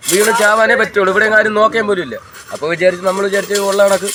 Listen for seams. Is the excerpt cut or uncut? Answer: uncut